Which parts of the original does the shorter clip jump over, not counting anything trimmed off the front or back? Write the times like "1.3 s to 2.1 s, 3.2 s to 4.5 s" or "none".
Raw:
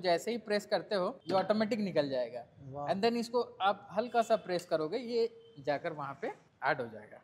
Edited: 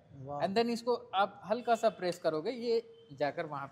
none